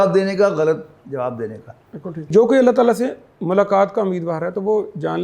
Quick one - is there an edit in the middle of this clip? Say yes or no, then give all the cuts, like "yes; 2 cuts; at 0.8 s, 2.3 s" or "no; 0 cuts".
yes; 1 cut; at 2.3 s